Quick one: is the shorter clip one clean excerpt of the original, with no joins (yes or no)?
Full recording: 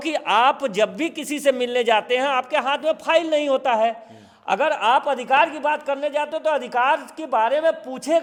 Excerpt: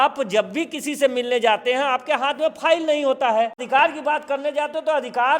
no